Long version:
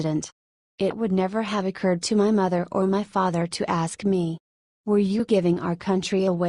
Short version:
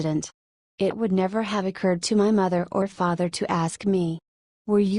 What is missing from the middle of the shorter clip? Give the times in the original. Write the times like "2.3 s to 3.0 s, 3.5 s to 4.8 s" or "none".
2.8 s to 3.0 s